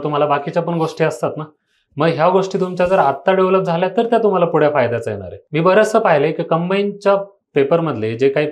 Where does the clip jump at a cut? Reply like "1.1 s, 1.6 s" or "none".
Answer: 5.4 s